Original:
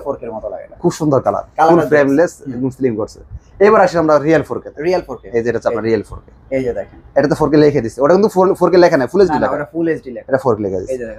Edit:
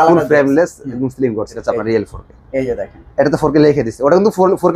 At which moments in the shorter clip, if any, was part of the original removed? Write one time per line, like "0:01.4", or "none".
0:01.6